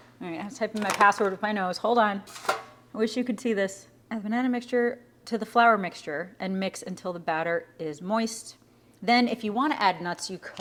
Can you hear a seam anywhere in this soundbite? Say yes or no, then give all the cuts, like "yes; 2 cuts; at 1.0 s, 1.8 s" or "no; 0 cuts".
no; 0 cuts